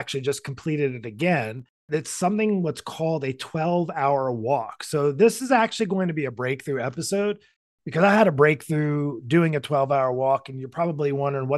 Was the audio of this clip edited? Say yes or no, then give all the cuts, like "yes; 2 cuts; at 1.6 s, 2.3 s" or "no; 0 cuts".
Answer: yes; 1 cut; at 1.8 s